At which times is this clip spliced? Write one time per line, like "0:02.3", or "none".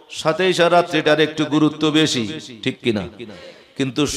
none